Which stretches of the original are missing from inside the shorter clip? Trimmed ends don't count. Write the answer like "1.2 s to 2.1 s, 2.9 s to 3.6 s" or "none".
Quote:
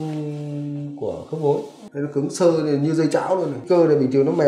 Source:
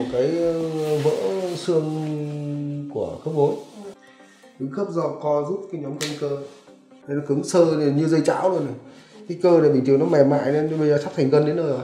3.7 s to 6.9 s, 8.7 s to 9.3 s